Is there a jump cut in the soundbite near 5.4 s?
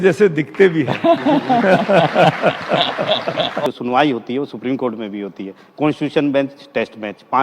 no; 1 cut; at 3.7 s

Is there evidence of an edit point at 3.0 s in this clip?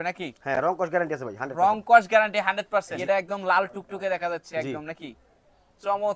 yes; 1 cut; at 3.0 s

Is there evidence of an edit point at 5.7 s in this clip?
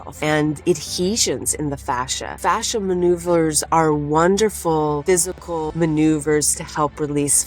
yes; 2 cuts; at 2.4 s, 5.7 s

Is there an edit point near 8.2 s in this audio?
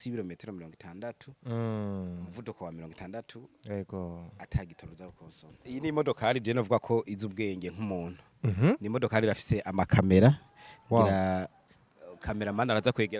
no; 1 cut; at 5.7 s

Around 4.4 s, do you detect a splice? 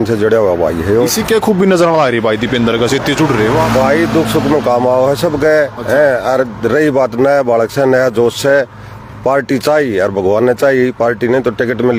no; 0 cuts

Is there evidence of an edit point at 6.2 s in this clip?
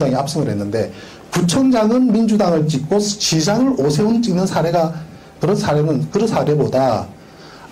no; 1 cut; at 3.4 s

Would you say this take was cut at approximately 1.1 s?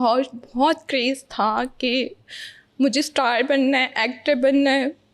no; 0 cuts

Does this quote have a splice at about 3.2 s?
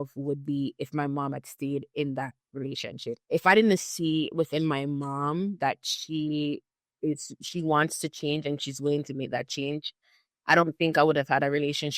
yes; 1 cut; at 3.2 s

